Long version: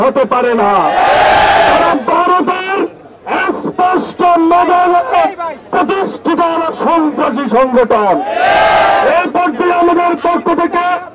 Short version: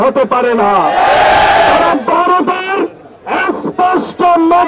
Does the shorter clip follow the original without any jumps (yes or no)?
yes